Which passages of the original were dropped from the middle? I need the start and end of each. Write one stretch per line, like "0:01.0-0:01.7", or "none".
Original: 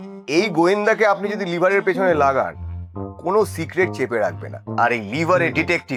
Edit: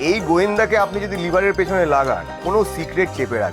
0:02.6-0:03.1